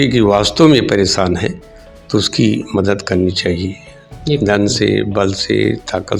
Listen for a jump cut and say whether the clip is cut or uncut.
uncut